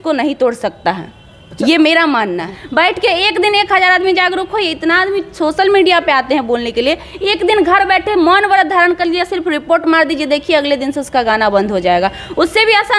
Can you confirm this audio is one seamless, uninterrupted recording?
yes; 0 cuts

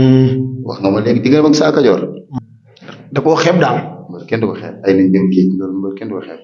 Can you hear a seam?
yes; 1 cut; at 2.2 s

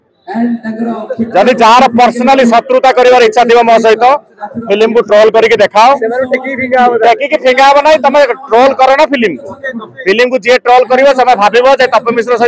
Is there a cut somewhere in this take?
no; 0 cuts

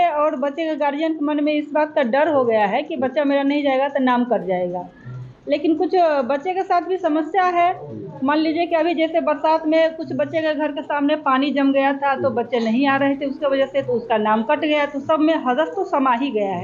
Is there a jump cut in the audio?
no; 0 cuts

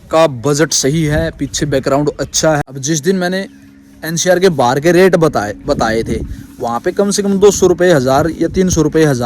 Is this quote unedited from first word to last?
no; 1 cut; at 2.6 s

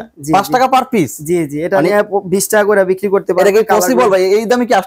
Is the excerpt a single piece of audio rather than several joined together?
yes; 0 cuts

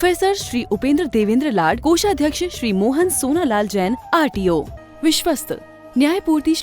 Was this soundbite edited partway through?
yes; 1 cut; at 4.8 s

